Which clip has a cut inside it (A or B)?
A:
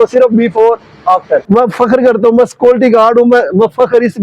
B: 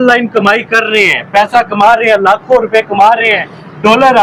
A